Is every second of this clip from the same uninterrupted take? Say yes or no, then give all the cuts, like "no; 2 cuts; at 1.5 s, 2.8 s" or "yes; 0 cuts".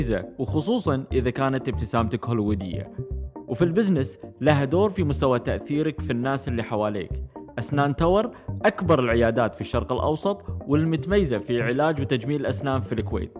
yes; 0 cuts